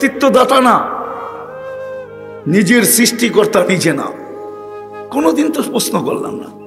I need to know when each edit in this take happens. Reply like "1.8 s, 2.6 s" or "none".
1.2 s, 2.4 s